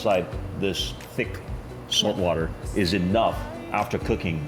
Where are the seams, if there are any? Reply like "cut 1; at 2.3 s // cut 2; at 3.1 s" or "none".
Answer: none